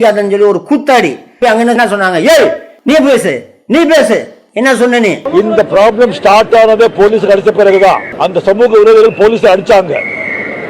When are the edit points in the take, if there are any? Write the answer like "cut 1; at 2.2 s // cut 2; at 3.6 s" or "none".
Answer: none